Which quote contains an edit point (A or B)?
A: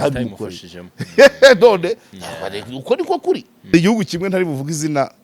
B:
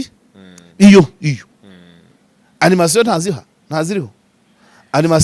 A